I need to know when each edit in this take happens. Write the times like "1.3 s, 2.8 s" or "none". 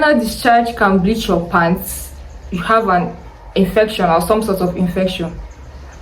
none